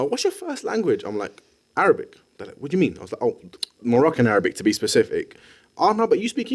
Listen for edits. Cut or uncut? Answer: uncut